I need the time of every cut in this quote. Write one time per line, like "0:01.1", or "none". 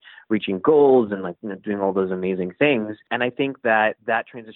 0:03.1